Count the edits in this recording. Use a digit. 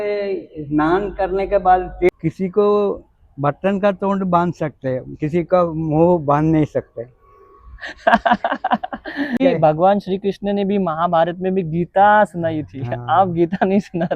2